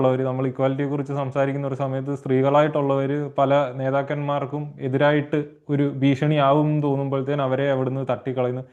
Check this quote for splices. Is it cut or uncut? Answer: uncut